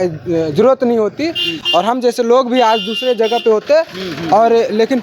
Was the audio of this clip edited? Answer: no; 0 cuts

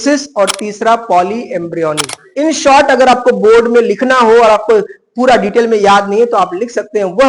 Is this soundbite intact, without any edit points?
no; 1 cut; at 2.2 s

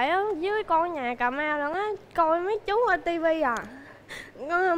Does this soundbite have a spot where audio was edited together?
no; 0 cuts

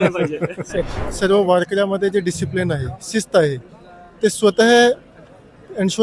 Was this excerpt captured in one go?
no; 1 cut; at 1.0 s

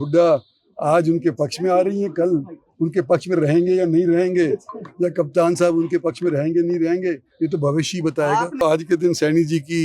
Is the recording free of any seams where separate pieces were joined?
no; 1 cut; at 8.6 s

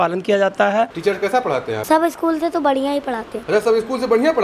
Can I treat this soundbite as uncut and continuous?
no; 3 cuts; at 0.9 s, 1.8 s, 3.3 s

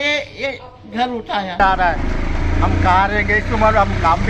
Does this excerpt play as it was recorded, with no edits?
no; 1 cut; at 1.6 s

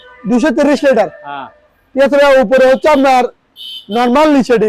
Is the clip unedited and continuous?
yes; 0 cuts

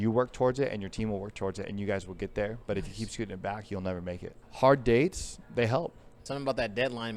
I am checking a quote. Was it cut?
yes; 2 cuts; at 4.4 s, 6.2 s

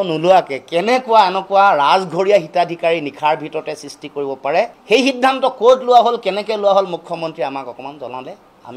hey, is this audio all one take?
yes; 0 cuts

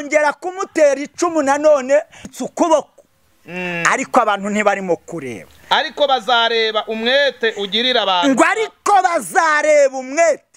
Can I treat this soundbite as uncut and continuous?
no; 1 cut; at 2.2 s

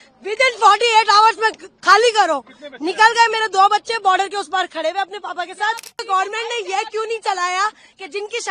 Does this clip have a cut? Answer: yes; 1 cut; at 6.0 s

